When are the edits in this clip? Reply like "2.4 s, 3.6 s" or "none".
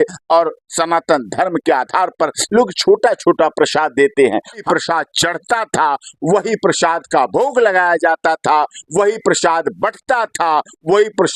4.7 s